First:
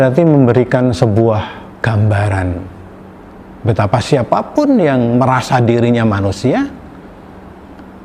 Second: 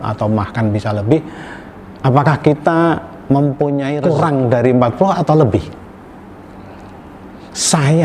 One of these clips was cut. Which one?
second; 1 cut; at 3.9 s

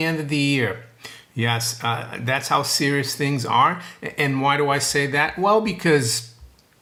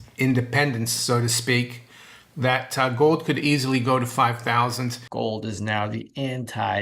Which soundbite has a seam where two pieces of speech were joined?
second; 1 cut; at 5.0 s

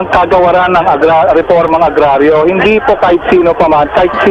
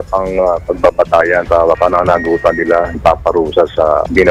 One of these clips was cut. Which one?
second; 2 cuts; at 1.5 s, 3.0 s

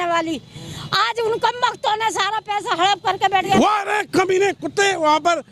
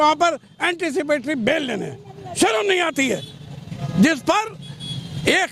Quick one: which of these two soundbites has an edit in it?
first; 1 cut; at 3.6 s

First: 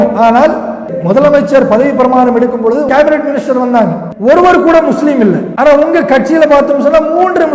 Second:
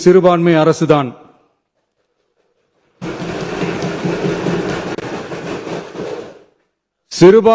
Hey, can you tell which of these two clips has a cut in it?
first; 4 cuts; at 0.9 s, 2.9 s, 4.1 s, 5.5 s

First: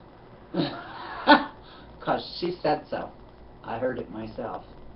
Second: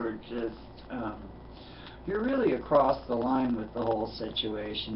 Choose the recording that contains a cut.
first; 1 cut; at 3.6 s

